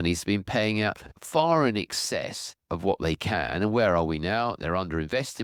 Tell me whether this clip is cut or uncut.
uncut